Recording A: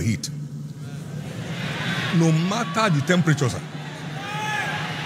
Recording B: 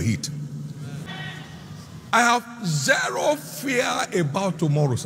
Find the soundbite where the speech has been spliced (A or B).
B